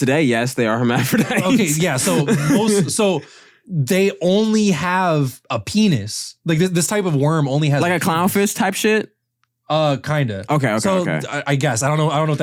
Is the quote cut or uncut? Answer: uncut